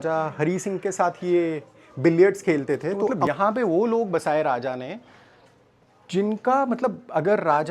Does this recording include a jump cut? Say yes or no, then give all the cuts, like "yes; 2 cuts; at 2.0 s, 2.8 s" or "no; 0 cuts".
yes; 1 cut; at 3.2 s